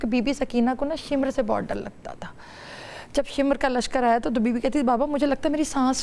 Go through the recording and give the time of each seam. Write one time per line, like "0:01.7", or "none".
none